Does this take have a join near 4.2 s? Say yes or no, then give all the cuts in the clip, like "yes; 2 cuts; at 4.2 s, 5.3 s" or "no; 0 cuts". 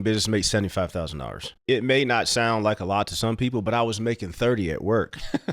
no; 1 cut; at 1.5 s